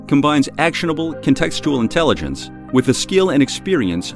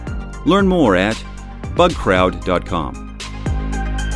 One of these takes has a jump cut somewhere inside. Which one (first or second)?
second